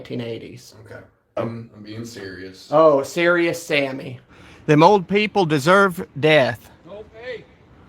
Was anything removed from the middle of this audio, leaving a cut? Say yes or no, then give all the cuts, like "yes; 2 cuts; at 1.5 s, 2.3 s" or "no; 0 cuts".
yes; 2 cuts; at 1.4 s, 4.3 s